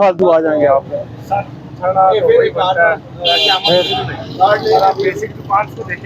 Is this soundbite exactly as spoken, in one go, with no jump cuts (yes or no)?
yes